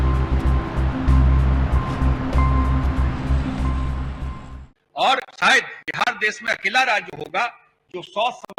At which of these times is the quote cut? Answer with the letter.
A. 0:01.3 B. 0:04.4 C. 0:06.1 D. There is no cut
B